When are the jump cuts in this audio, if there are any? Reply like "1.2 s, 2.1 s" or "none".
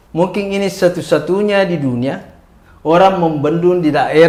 none